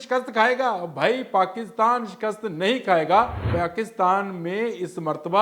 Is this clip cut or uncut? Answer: cut